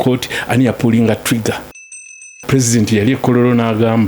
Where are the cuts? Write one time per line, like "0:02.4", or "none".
0:02.0